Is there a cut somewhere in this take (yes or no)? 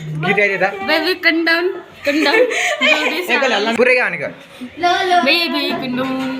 yes